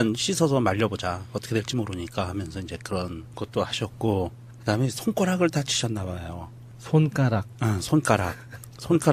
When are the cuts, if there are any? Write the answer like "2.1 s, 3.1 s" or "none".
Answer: 2.3 s

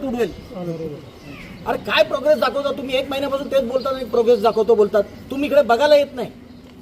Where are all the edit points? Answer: 0.9 s

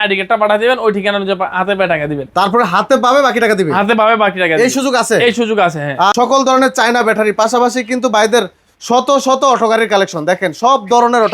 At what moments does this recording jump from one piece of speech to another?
6.1 s

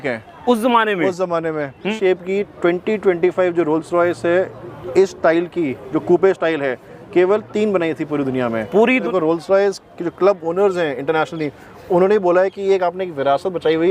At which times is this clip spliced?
1.9 s, 9.0 s

